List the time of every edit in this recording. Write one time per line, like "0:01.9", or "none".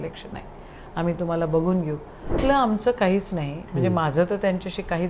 0:02.4